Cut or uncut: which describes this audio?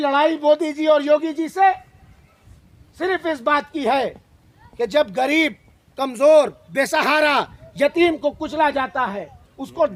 uncut